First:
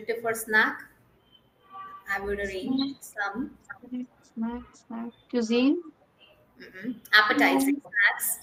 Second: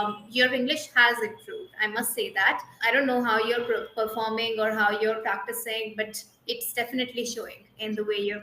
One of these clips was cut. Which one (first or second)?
second